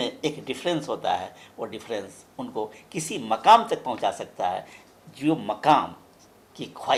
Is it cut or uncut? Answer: uncut